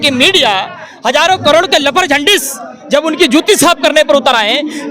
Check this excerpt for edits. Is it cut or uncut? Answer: uncut